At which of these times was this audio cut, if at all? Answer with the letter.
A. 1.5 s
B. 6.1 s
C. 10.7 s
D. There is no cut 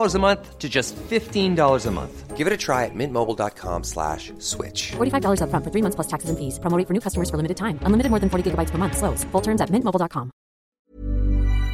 C